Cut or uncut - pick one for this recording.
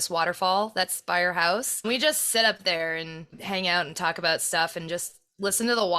cut